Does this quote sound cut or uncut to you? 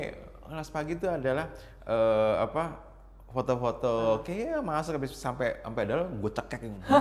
uncut